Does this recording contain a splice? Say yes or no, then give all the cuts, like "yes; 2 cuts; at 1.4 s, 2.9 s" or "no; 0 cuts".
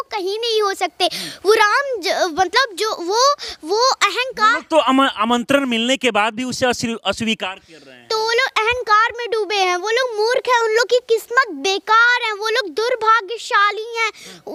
no; 0 cuts